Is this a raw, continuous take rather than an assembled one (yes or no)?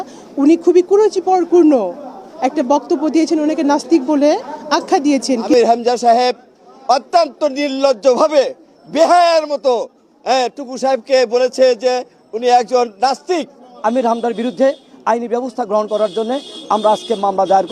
no